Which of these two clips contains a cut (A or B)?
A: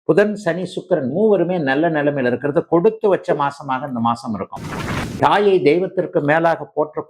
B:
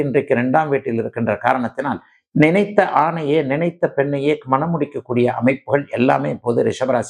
A